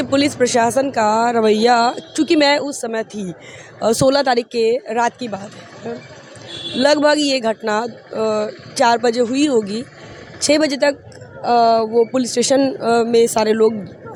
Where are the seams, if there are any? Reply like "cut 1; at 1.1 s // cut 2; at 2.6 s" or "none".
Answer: none